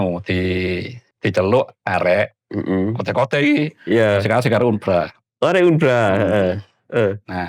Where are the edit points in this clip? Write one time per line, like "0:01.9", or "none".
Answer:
0:01.0